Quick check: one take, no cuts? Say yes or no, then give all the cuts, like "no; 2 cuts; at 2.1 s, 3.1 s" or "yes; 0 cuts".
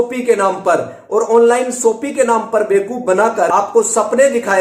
no; 1 cut; at 3.5 s